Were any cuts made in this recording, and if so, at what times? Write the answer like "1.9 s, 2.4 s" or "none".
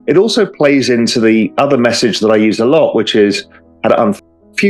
none